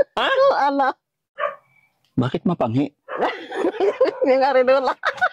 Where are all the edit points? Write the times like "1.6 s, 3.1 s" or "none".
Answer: 1.1 s

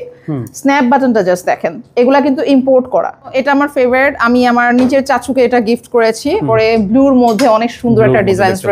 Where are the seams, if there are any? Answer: 3.3 s, 6.4 s

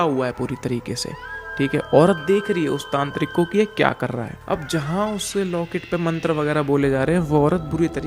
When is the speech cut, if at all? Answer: 4.3 s

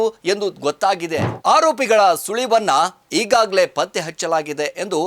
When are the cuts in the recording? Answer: 1.3 s

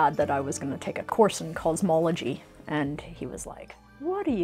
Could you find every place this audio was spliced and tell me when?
1.0 s

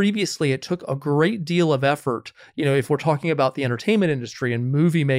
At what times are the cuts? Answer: none

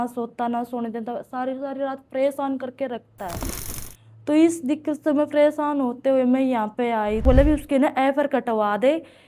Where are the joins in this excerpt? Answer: 7.2 s

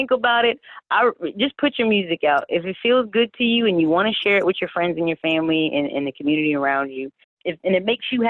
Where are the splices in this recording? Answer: 7.4 s

